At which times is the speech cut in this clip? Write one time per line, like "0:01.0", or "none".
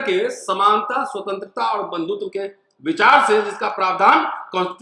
none